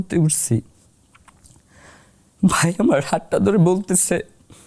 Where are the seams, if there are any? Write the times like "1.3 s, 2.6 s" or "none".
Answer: 1.0 s